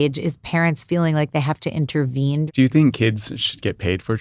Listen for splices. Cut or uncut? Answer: cut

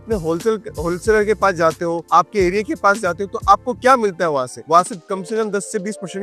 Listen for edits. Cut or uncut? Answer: uncut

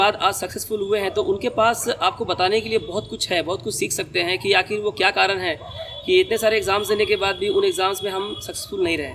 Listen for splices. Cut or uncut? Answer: uncut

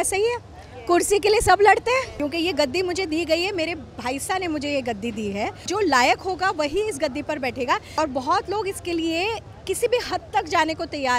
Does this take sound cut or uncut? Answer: cut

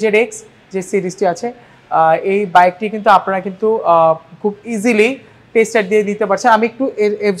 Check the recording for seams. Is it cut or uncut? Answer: uncut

